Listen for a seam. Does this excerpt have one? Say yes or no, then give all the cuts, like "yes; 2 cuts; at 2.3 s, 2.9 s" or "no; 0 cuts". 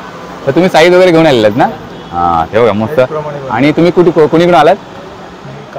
no; 0 cuts